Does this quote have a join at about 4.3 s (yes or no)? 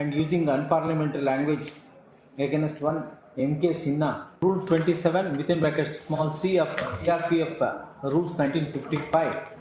yes